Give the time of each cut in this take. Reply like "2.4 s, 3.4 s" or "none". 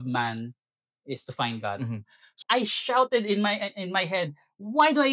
2.4 s

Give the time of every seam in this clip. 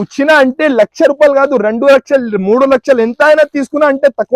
none

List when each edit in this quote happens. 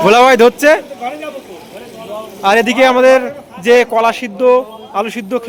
none

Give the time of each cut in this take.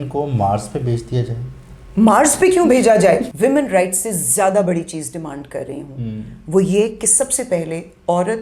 3.3 s

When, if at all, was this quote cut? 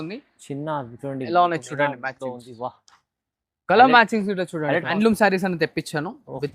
4.9 s

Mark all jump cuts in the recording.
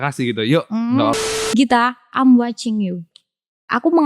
1.2 s

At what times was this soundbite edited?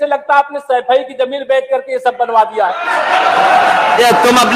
none

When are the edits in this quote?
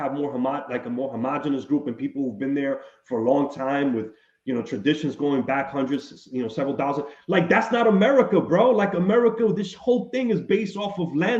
none

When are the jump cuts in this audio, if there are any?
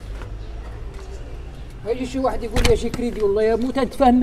none

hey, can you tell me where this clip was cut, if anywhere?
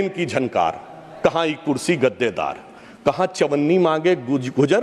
none

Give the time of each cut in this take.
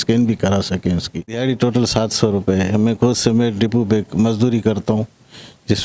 1.4 s

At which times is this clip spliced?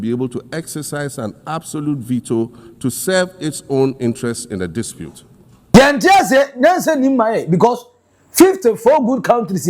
5.7 s

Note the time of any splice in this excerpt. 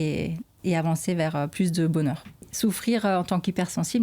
2.5 s

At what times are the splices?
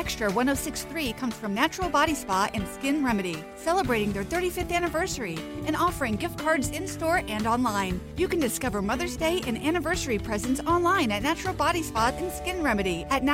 none

